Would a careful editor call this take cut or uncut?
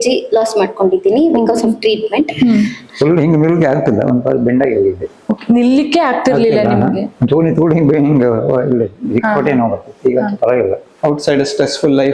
cut